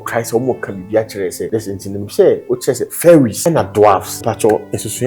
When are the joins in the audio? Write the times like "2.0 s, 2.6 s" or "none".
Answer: 1.4 s, 3.4 s, 4.1 s